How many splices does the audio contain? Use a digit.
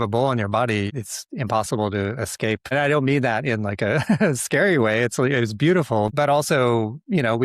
3